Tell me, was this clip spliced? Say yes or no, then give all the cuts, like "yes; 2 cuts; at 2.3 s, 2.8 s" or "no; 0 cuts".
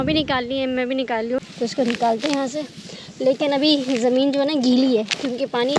yes; 1 cut; at 1.4 s